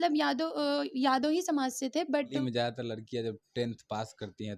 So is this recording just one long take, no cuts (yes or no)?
no